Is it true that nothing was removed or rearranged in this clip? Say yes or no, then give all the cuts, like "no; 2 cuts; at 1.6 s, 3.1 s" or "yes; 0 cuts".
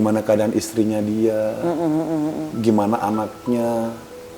no; 1 cut; at 2.5 s